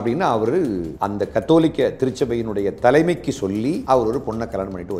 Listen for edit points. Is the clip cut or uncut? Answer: cut